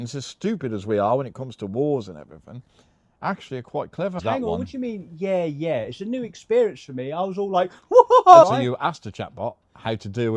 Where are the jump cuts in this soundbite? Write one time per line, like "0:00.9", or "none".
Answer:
0:04.2
0:08.4